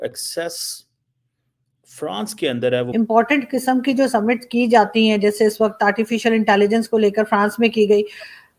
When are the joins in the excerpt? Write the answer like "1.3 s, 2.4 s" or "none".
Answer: 2.9 s

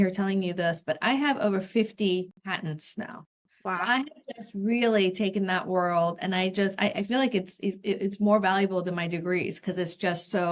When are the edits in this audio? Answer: none

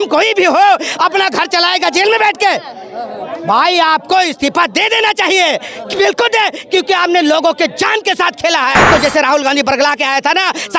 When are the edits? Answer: 8.9 s

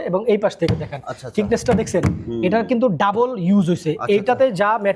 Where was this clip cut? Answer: none

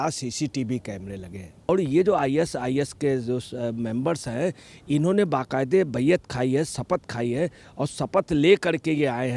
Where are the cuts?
1.7 s

